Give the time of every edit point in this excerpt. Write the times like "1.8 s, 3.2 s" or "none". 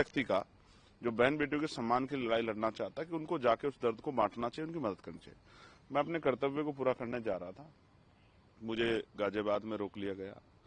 none